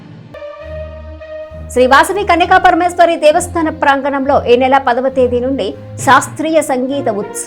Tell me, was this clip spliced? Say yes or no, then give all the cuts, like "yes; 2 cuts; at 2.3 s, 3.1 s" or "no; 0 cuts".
yes; 1 cut; at 1.0 s